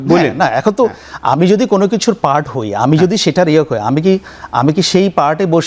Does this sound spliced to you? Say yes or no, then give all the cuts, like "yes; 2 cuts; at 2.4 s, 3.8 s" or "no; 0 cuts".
no; 0 cuts